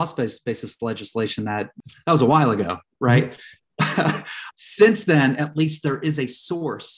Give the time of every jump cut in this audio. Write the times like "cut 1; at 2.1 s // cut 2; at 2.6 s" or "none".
cut 1; at 1.8 s // cut 2; at 4.4 s

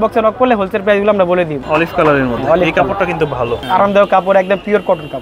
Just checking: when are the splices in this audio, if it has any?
cut 1; at 1.6 s // cut 2; at 3.6 s

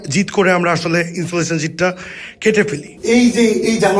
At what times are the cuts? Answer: cut 1; at 2.9 s

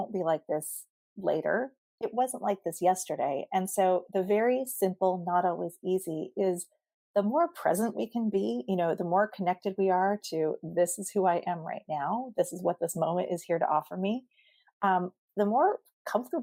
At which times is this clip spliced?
none

